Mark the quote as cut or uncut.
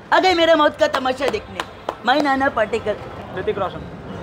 cut